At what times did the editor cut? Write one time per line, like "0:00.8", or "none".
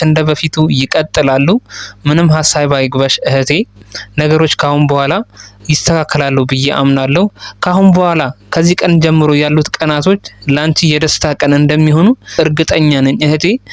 0:12.3